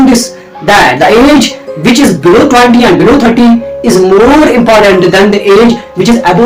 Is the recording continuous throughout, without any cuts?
yes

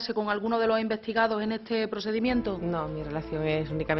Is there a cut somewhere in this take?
no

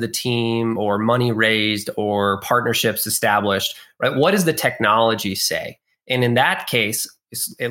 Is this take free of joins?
yes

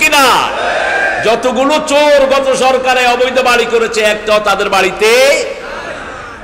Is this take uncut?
yes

